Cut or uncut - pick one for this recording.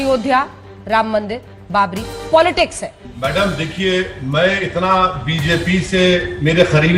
cut